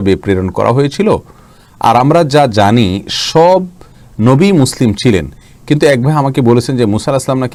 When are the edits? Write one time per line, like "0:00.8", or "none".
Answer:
none